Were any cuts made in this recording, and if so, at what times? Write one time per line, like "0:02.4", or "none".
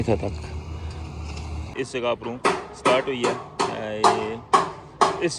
0:01.7